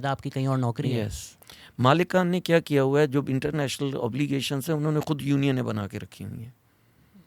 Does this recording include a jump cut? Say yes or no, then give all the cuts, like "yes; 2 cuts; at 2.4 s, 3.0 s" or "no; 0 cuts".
yes; 1 cut; at 1.2 s